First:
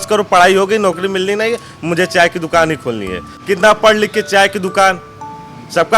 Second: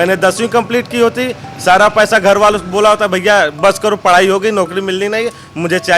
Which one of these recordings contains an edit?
first; 1 cut; at 3.3 s

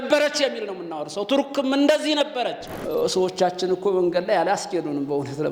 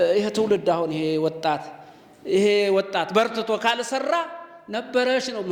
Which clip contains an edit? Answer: first; 1 cut; at 2.7 s

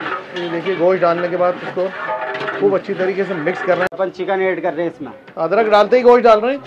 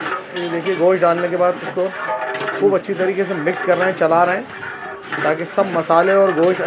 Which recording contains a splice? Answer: first; 1 cut; at 4.0 s

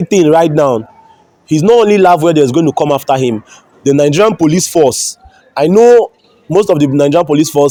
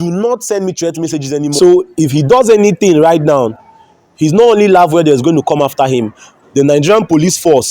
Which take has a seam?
second; 1 cut; at 1.6 s

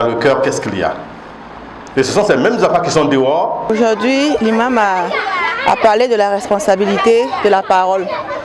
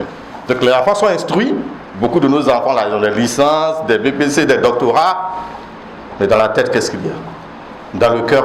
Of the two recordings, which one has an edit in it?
first; 1 cut; at 3.6 s

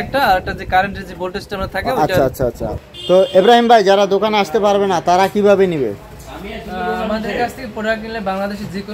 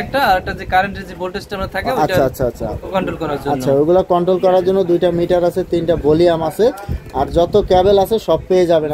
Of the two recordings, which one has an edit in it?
first; 1 cut; at 2.7 s

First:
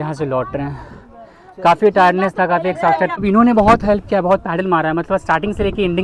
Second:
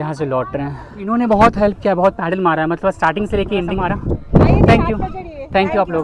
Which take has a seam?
second; 2 cuts; at 1.0 s, 3.7 s

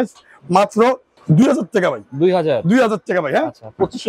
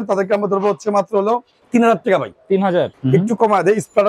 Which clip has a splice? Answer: second; 2 cuts; at 1.5 s, 2.9 s

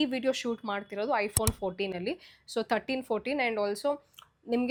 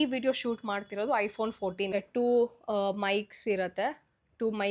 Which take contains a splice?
second; 1 cut; at 1.9 s

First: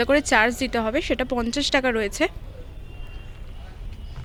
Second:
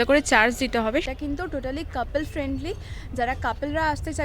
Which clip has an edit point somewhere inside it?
second; 1 cut; at 1.0 s

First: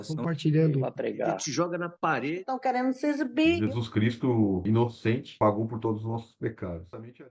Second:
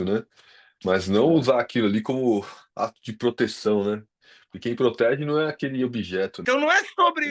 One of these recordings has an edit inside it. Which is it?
second; 1 cut; at 6.4 s

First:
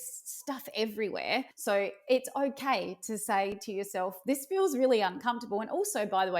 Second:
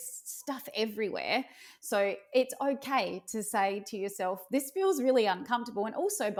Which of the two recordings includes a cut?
first; 1 cut; at 1.5 s

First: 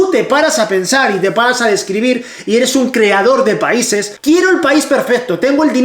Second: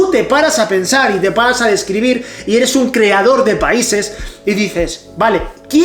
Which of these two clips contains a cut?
first; 1 cut; at 4.1 s

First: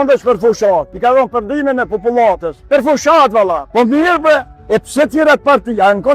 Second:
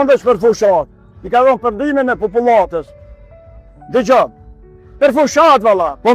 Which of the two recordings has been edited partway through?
first; 3 cuts; at 0.9 s, 2.5 s, 4.5 s

